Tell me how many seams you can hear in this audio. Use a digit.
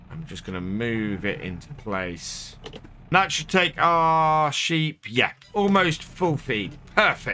1